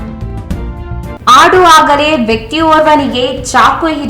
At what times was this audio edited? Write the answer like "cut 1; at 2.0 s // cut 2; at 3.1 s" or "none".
cut 1; at 1.2 s